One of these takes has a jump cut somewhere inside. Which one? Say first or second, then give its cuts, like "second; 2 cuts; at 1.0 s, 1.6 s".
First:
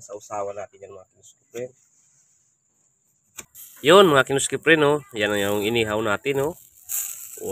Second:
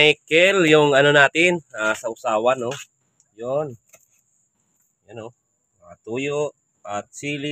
first; 1 cut; at 3.6 s